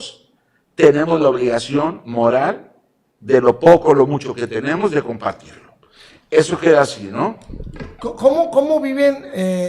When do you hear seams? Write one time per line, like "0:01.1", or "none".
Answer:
none